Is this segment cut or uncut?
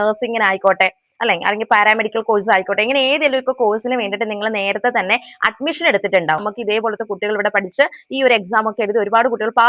cut